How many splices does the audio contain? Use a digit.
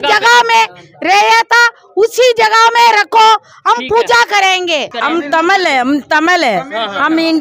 1